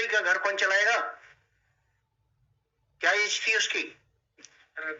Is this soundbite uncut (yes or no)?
yes